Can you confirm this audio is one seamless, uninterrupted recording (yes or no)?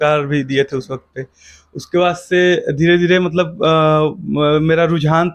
yes